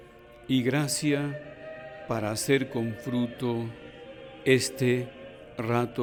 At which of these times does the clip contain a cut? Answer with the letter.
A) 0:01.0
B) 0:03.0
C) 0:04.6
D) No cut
D